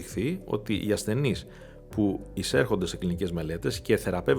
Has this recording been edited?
no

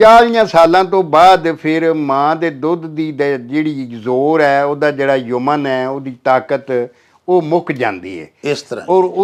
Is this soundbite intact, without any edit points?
yes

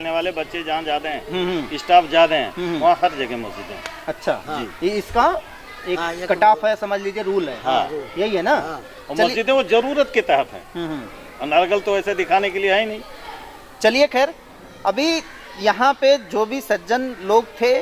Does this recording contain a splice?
no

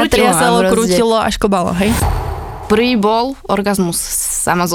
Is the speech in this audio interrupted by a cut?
yes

